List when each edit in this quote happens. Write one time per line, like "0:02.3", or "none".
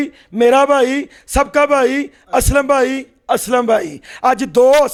none